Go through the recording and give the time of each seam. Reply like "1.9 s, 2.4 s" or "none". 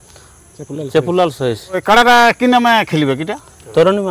1.8 s